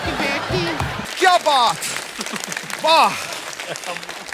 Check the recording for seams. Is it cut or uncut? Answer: cut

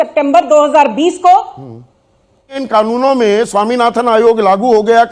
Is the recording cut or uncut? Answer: cut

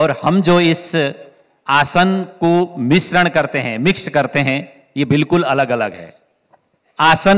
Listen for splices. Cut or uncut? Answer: uncut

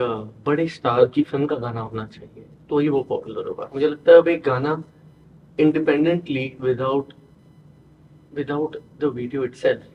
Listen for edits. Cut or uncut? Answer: uncut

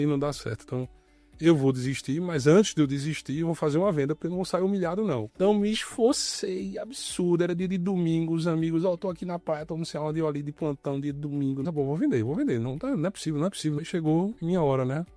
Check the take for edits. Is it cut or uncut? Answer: cut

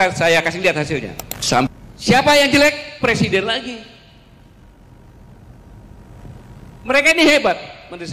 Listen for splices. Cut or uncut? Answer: cut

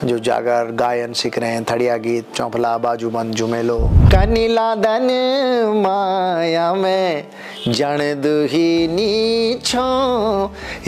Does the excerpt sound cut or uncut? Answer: cut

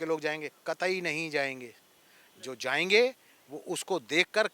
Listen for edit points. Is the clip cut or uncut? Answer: uncut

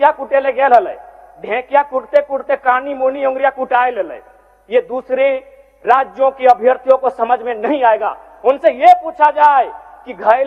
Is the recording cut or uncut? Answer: uncut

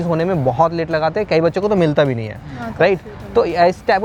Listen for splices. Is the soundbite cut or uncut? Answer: uncut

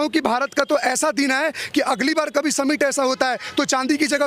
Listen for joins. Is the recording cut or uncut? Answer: uncut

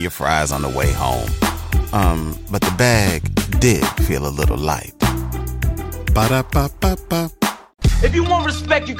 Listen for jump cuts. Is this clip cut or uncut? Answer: cut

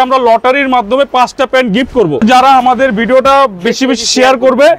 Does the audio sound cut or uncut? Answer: cut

